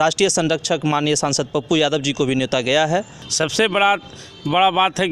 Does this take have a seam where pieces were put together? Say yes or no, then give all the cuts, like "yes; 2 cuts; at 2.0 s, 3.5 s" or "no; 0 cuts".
yes; 1 cut; at 3.2 s